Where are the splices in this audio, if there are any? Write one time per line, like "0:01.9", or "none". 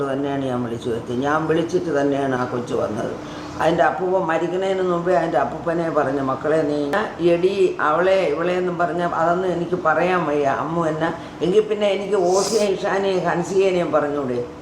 0:06.9